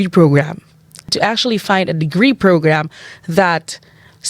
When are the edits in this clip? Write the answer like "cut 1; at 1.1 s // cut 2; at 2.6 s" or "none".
cut 1; at 1.1 s